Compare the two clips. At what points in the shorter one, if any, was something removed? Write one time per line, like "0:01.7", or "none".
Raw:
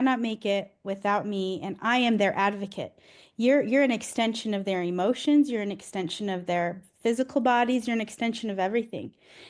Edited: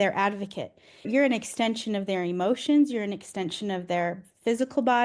0:01.1